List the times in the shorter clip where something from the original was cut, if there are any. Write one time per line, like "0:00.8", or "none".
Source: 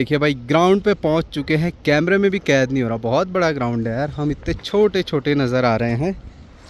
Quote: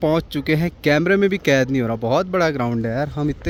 none